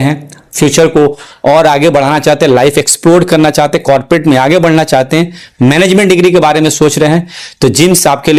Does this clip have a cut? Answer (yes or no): no